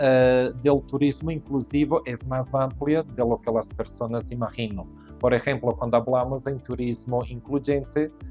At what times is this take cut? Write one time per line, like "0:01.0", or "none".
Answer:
none

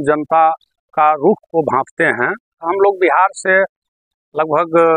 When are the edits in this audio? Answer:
0:02.6

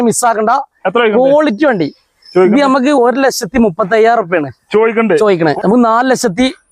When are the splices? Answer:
0:05.6

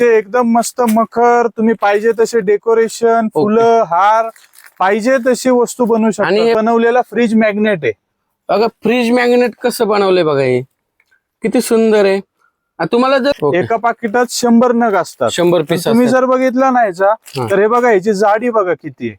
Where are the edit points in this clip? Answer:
0:06.6
0:13.4

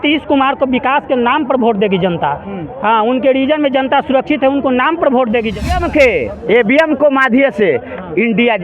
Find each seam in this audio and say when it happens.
0:05.8

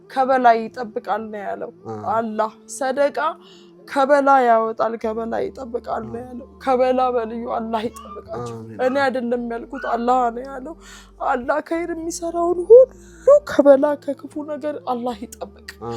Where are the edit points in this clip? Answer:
none

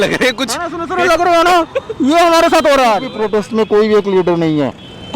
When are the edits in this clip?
0:03.1

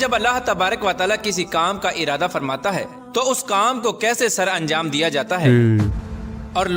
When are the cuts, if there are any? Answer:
none

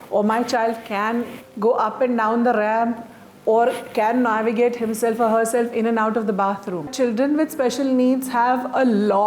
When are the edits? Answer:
0:01.4
0:06.9

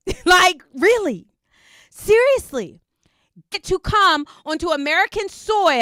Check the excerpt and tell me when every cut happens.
0:03.6

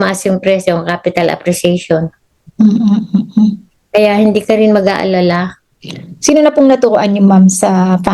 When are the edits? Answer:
none

